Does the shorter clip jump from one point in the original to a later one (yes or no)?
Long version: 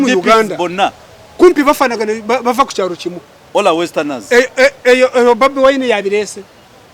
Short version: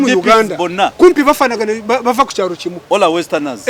yes